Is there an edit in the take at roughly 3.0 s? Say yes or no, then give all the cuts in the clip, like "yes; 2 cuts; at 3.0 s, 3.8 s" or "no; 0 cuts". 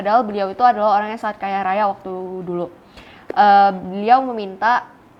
no; 0 cuts